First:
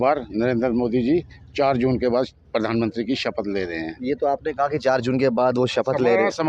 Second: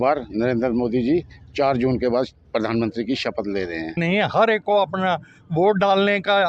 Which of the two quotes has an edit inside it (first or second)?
second